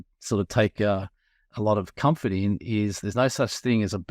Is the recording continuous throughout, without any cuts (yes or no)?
no